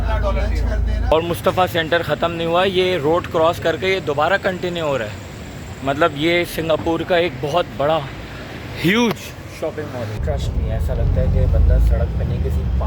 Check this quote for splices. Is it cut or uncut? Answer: cut